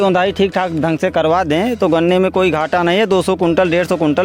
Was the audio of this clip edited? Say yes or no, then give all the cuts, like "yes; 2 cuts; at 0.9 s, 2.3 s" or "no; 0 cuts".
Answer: no; 0 cuts